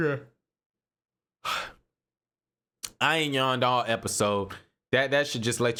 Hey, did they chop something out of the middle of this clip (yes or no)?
no